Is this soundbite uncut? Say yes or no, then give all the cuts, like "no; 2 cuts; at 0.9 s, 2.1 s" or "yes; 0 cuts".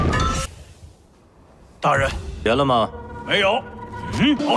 yes; 0 cuts